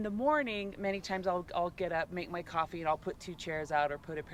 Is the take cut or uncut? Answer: uncut